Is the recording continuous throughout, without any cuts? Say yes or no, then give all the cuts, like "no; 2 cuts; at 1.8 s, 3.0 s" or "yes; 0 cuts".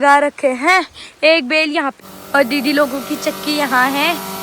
no; 1 cut; at 1.9 s